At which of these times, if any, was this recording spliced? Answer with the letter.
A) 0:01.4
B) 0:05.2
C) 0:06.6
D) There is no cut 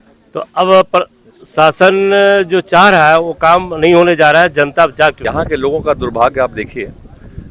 B